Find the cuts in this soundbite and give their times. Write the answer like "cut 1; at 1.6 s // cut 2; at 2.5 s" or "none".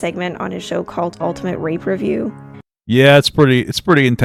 none